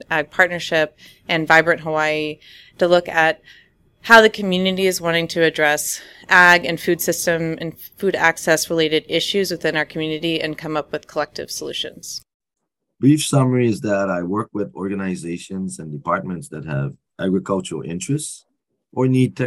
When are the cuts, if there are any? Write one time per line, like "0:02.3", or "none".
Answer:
0:12.1